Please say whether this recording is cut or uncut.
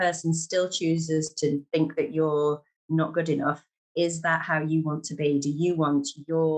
uncut